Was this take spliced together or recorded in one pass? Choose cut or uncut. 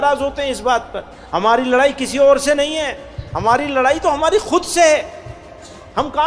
uncut